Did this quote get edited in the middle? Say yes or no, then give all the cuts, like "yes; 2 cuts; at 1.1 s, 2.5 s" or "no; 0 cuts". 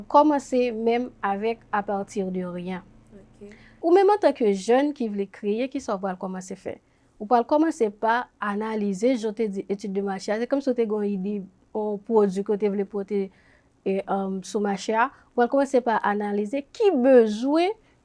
yes; 1 cut; at 3.8 s